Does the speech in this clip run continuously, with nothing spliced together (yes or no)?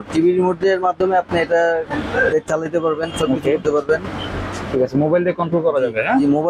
yes